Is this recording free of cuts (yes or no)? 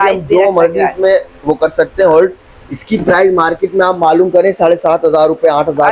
yes